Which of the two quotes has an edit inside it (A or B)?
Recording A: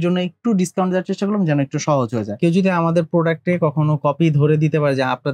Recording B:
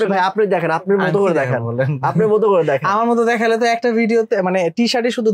A